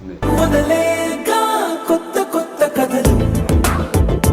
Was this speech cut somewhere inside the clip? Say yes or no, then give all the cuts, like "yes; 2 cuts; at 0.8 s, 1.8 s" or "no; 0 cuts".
no; 0 cuts